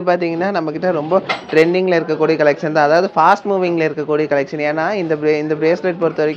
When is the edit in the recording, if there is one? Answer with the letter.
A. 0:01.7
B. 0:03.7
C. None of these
C